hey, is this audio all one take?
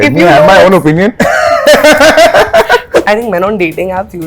no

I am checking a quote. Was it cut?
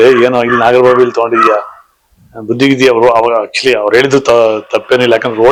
no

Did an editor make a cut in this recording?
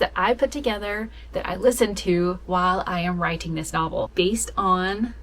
yes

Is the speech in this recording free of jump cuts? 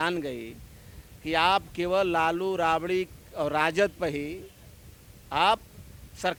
yes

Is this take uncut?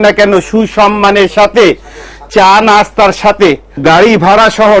yes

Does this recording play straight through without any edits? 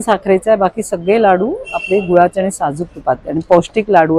yes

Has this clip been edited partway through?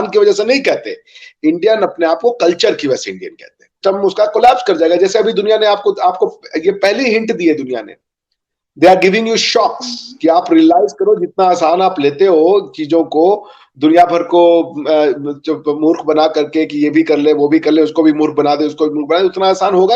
yes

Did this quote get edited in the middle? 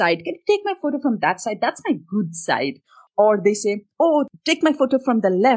yes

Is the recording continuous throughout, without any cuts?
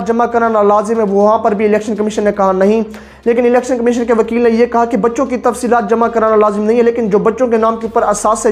yes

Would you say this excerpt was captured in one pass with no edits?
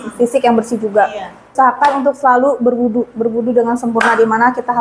no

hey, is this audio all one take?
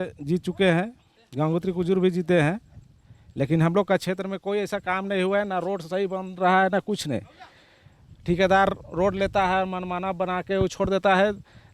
yes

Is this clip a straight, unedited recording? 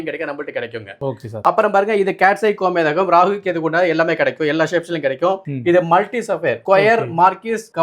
yes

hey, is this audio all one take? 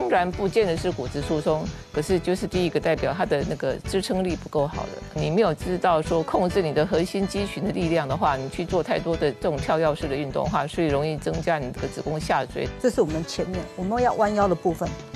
no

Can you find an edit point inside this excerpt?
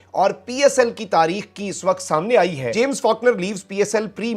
yes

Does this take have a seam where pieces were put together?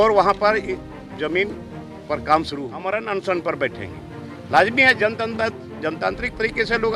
yes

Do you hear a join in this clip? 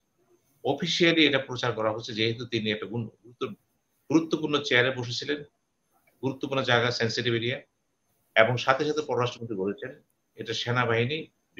no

